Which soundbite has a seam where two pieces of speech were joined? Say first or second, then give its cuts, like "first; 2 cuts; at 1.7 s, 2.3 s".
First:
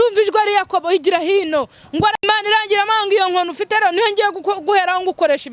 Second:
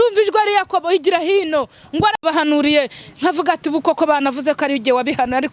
first; 1 cut; at 2.2 s